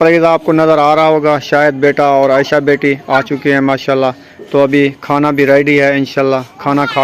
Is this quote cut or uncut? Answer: uncut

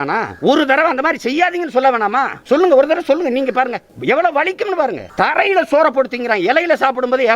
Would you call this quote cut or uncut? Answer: cut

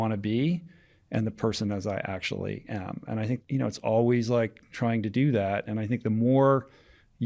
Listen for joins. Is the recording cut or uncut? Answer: cut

